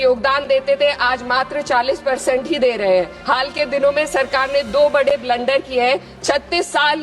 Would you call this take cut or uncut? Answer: cut